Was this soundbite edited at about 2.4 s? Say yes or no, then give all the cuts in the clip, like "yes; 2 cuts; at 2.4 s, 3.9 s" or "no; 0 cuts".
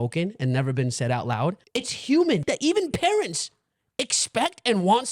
yes; 2 cuts; at 1.6 s, 2.4 s